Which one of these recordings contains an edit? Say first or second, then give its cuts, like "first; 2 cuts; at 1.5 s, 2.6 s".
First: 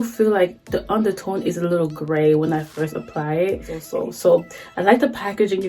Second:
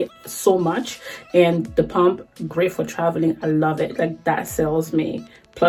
first; 1 cut; at 3.8 s